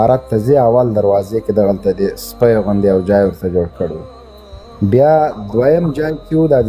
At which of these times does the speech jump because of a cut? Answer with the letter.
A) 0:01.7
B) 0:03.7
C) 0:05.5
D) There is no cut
D